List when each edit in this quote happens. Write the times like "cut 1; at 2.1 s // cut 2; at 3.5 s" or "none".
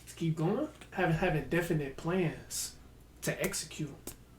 cut 1; at 0.9 s